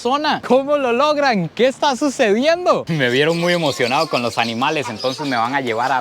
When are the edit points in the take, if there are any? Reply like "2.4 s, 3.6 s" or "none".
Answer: 2.8 s